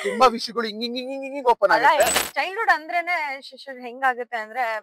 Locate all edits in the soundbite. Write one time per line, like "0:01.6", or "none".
0:02.2

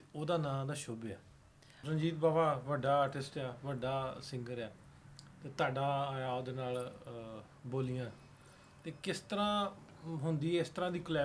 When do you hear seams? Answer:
0:01.7

